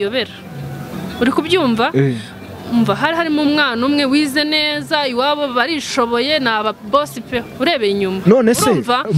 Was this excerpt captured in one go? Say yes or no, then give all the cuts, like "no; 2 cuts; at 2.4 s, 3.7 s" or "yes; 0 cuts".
yes; 0 cuts